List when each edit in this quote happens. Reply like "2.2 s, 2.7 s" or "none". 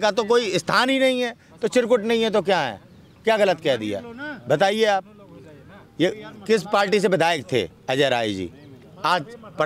none